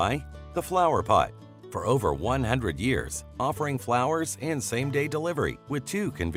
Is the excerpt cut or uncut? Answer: uncut